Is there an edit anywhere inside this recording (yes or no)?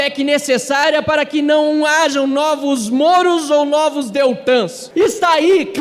yes